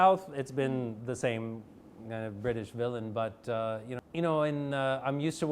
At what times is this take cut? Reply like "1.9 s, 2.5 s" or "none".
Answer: 4.0 s

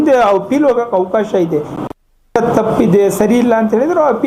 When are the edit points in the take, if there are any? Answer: none

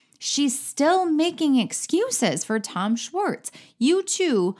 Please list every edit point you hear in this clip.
none

